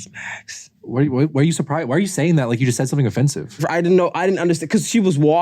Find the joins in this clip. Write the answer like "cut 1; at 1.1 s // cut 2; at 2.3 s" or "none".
cut 1; at 3.6 s

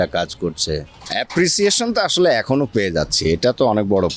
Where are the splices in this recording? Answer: cut 1; at 1.0 s

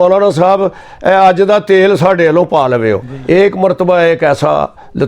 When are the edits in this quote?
cut 1; at 3.1 s

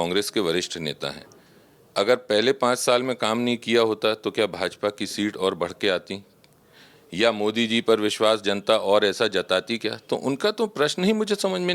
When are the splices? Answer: none

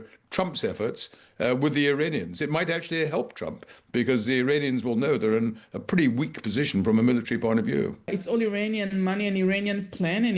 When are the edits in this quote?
cut 1; at 8.1 s

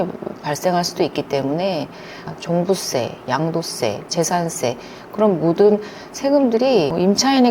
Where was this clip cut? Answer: cut 1; at 2.2 s

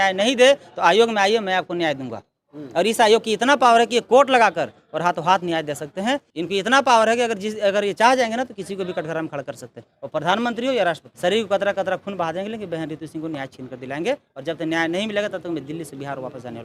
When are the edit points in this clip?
cut 1; at 6.3 s // cut 2; at 11.1 s

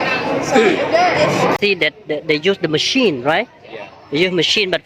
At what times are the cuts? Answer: cut 1; at 1.6 s

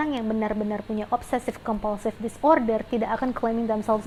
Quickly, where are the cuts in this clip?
none

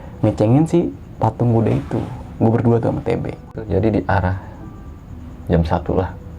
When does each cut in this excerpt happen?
cut 1; at 3.5 s

